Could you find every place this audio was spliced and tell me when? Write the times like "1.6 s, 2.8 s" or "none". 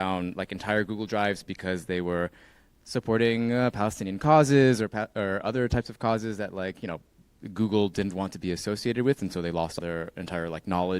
9.7 s